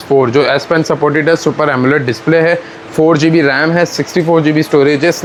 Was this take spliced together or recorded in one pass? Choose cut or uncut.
uncut